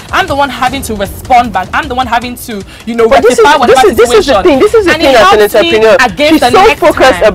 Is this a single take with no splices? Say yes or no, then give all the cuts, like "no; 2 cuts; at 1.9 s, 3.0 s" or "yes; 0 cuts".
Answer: yes; 0 cuts